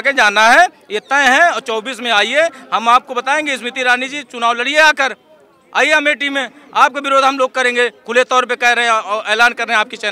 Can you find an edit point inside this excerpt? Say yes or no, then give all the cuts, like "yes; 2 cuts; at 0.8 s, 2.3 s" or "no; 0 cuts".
no; 0 cuts